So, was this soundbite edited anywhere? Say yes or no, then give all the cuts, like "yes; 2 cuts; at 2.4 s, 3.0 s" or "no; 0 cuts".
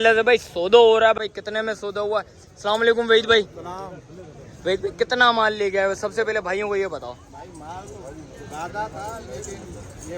yes; 1 cut; at 1.2 s